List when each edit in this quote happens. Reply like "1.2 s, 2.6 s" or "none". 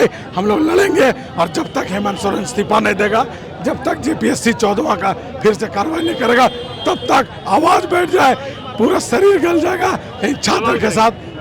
none